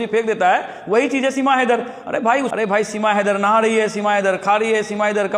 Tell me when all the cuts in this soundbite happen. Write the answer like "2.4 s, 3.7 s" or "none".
2.5 s